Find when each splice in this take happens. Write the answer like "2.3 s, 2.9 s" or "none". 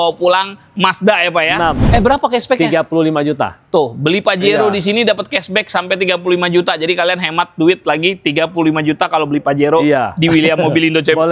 1.9 s